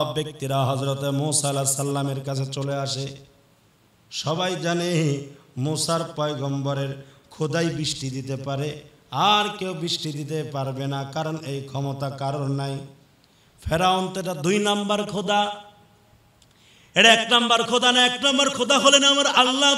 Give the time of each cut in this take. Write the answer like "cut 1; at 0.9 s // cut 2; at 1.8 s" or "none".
none